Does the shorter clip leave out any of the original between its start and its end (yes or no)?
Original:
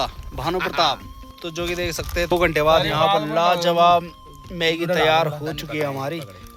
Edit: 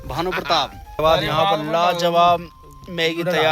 yes